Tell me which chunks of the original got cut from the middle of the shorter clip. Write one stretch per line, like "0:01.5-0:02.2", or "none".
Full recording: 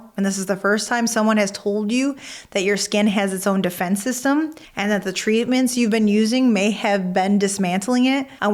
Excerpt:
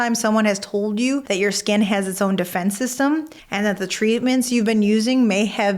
0:02.2-0:02.5